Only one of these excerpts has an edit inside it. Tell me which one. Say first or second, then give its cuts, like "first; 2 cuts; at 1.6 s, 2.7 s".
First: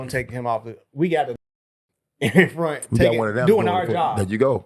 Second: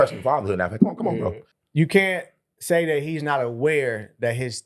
second; 1 cut; at 1.5 s